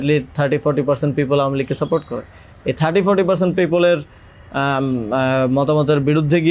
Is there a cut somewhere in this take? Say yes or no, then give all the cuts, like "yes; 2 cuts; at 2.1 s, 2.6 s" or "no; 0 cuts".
no; 0 cuts